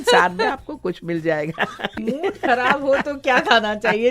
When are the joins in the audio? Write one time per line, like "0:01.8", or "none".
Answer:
0:02.0